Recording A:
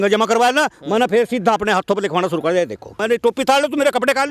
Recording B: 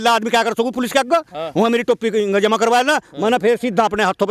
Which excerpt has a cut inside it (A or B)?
A